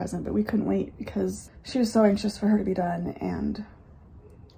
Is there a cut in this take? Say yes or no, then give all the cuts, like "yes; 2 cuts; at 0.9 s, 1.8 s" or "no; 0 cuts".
yes; 1 cut; at 1.5 s